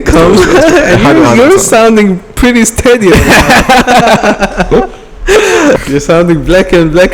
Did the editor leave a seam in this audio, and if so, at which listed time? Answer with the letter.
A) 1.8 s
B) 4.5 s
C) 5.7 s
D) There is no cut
C